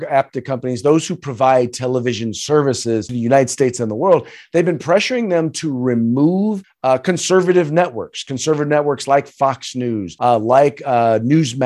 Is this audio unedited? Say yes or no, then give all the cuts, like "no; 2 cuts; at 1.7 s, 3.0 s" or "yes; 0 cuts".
no; 3 cuts; at 3.1 s, 6.7 s, 10.1 s